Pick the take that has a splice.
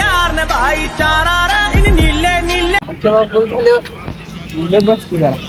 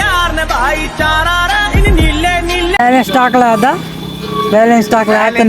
second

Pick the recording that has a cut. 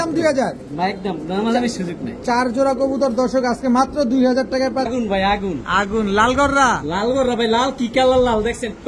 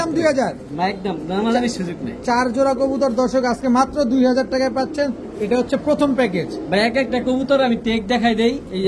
first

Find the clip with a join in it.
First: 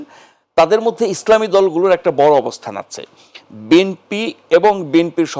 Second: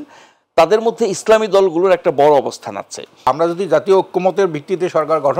second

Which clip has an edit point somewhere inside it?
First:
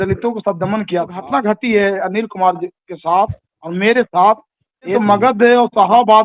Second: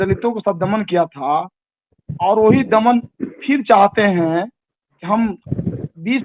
first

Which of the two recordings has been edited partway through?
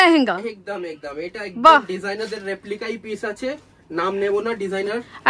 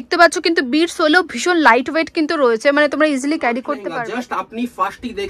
second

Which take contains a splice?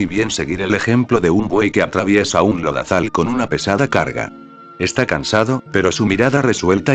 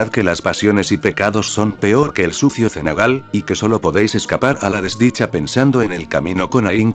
second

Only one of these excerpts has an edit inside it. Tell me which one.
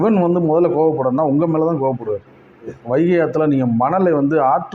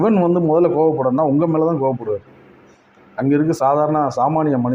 first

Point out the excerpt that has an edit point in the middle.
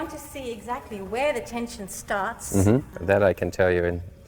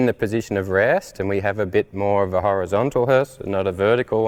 first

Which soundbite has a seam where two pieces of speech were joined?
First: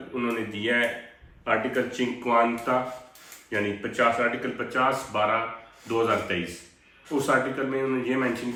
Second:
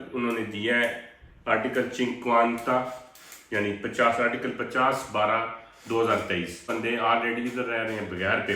second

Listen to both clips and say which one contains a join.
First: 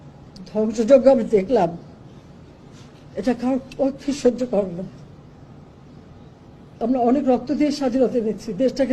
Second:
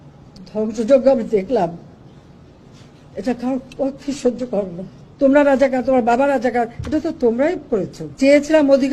second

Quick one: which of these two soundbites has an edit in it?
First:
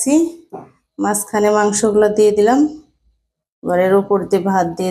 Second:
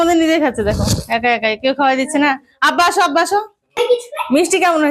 second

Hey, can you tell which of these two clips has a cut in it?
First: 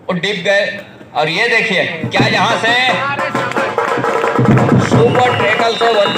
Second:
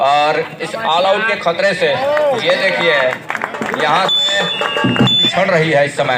second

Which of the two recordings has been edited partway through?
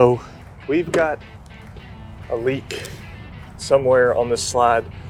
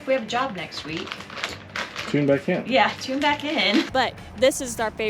second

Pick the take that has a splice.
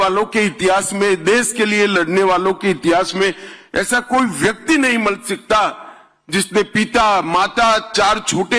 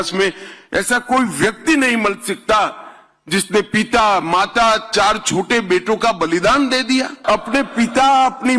second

